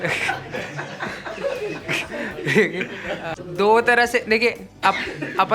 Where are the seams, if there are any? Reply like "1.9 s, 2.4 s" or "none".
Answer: 3.4 s

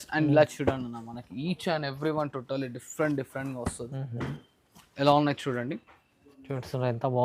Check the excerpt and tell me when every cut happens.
none

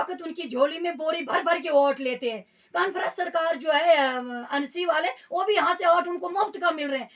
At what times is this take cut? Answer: none

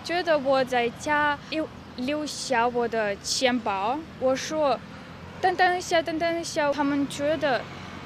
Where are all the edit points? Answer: 1.5 s, 4.1 s

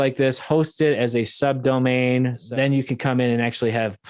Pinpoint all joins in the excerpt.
2.4 s

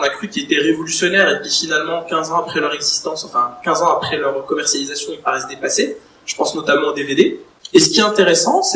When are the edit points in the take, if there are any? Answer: 7.5 s

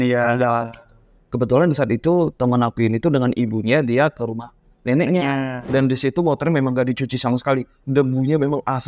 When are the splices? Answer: 5.6 s

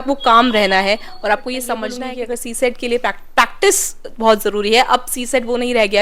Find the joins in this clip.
2.0 s

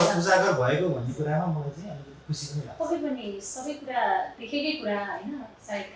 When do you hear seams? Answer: none

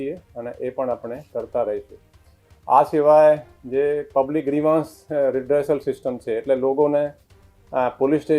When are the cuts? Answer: none

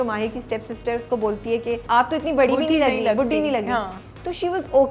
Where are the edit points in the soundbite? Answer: 1.8 s

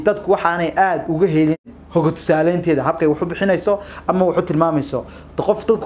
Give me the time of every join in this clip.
1.7 s

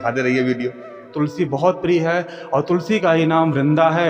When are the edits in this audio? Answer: 1.1 s

